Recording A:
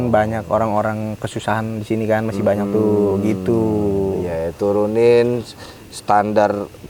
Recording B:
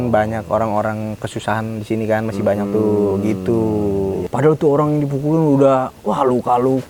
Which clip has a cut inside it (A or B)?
B